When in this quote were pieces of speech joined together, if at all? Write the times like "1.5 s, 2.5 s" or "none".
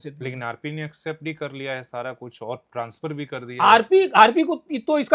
none